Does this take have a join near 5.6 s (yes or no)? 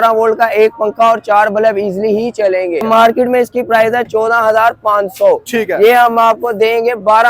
no